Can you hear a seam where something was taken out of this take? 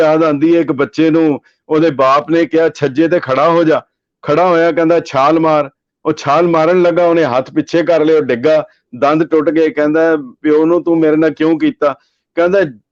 no; 0 cuts

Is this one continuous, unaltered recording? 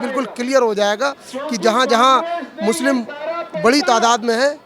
yes; 0 cuts

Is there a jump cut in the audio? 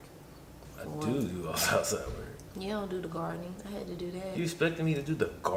no; 0 cuts

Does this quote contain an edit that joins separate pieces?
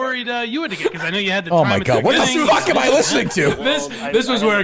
no; 0 cuts

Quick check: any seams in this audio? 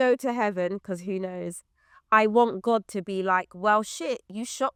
no; 0 cuts

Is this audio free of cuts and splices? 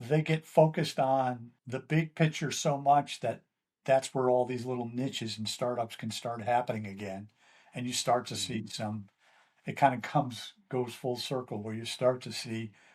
no; 1 cut; at 1.5 s

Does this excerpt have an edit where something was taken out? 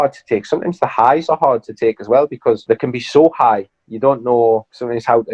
no; 0 cuts

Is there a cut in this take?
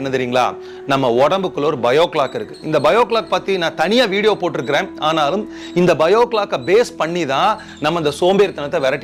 no; 0 cuts

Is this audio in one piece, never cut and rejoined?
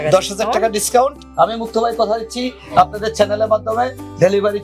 no; 1 cut; at 1.2 s

